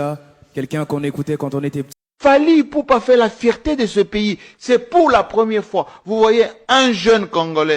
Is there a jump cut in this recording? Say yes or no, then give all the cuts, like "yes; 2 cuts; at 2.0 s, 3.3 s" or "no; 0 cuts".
yes; 1 cut; at 1.9 s